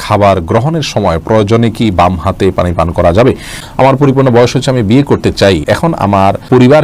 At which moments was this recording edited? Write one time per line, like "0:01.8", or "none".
0:03.6
0:06.0